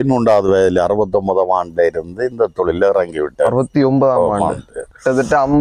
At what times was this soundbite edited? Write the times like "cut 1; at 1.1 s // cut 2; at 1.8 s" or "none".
none